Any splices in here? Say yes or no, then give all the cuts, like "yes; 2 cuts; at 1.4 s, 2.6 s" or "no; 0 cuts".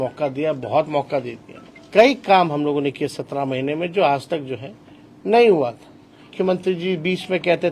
yes; 2 cuts; at 1.8 s, 6.4 s